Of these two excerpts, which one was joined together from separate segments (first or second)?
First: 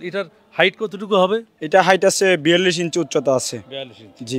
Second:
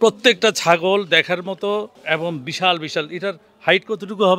second